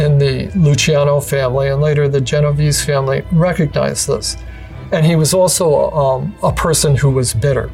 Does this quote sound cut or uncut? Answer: cut